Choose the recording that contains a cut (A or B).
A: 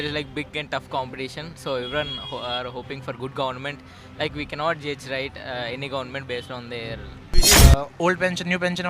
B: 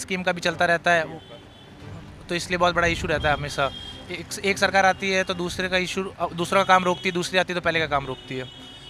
A